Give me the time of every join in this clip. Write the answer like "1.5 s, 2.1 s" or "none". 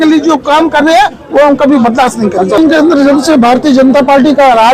none